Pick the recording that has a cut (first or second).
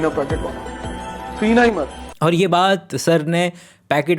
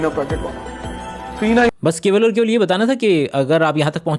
first